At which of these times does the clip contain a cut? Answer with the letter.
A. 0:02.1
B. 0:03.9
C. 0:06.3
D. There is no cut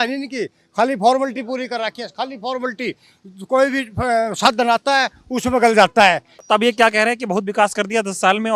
C